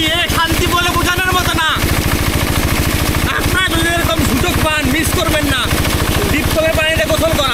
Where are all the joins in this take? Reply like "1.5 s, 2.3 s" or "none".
none